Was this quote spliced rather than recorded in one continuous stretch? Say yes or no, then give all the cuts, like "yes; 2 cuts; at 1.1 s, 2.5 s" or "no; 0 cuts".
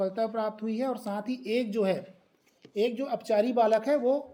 no; 0 cuts